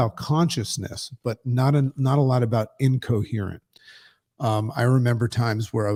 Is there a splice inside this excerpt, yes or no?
no